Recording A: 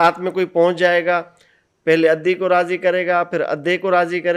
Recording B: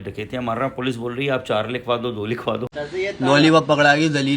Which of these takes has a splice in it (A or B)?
B